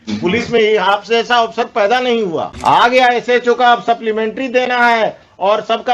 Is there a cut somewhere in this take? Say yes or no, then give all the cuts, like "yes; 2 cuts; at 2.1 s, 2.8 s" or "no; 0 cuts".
yes; 1 cut; at 2.5 s